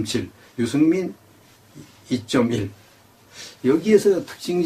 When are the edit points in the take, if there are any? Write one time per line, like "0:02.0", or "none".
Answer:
0:03.4